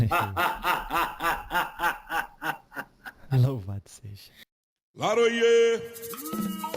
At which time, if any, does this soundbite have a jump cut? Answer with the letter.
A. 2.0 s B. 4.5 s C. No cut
B